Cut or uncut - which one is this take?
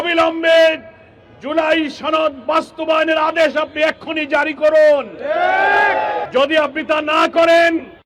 cut